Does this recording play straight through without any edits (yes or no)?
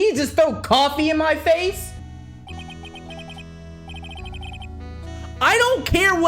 no